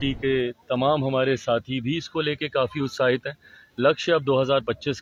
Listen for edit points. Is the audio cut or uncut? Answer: uncut